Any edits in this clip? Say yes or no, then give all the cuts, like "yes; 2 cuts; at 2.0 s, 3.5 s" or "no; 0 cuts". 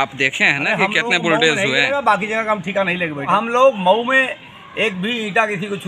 yes; 1 cut; at 3.3 s